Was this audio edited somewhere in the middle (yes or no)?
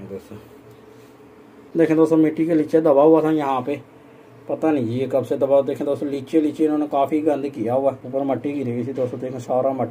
no